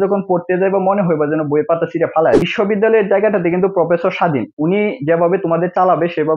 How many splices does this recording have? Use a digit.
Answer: 1